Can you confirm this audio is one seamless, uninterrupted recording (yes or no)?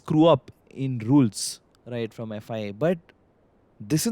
yes